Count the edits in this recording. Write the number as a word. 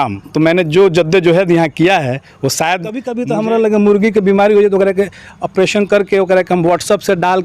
one